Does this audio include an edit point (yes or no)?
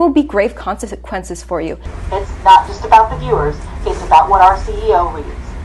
yes